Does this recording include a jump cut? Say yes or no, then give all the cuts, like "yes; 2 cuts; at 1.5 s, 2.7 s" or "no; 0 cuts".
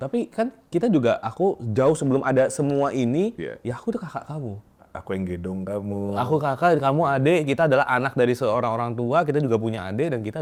no; 0 cuts